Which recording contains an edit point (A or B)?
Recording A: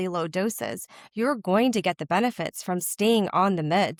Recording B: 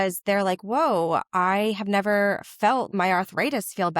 B